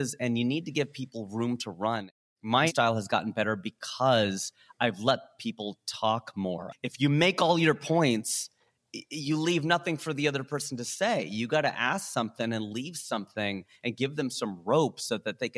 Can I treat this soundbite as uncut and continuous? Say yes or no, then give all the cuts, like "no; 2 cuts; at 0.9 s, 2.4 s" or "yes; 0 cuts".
no; 2 cuts; at 2.7 s, 6.7 s